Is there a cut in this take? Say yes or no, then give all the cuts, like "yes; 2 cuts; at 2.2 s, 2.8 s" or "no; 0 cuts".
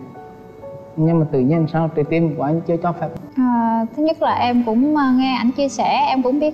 yes; 1 cut; at 3.1 s